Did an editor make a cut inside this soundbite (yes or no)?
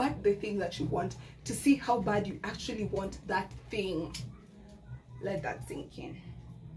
no